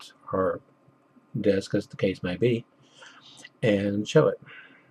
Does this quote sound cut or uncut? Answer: uncut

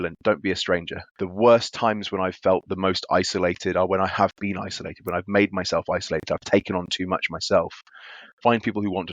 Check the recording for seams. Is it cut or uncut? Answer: cut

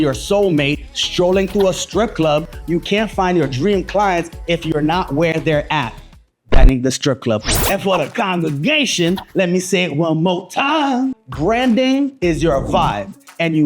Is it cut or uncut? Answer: cut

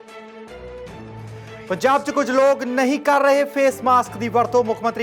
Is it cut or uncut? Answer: cut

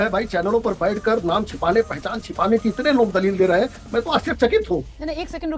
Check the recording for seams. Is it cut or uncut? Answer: uncut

